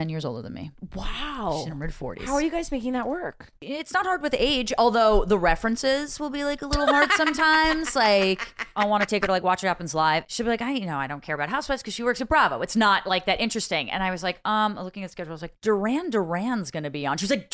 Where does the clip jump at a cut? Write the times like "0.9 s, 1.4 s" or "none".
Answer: 3.5 s, 8.7 s, 10.2 s

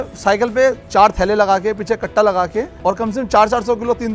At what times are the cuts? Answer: 0.8 s, 2.7 s

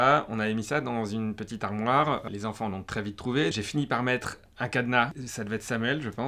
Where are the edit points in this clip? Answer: 2.2 s, 5.2 s

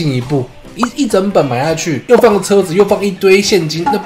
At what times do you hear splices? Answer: 1.9 s

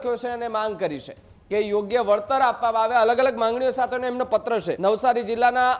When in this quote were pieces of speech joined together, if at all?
4.7 s

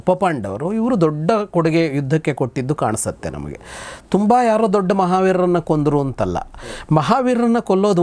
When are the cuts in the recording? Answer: none

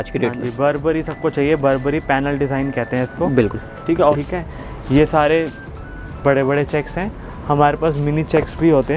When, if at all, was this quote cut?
4.1 s

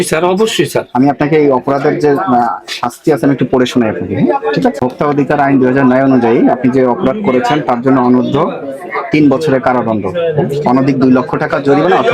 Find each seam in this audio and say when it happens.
4.8 s

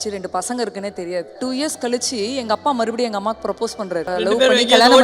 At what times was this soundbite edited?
1.4 s, 4.1 s

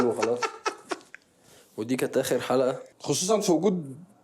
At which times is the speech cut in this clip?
2.9 s

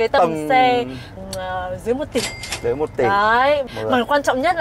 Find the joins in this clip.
1.1 s, 3.7 s

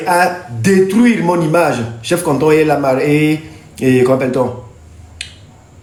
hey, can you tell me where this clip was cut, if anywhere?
none

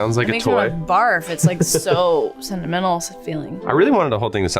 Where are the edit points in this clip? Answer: 3.0 s

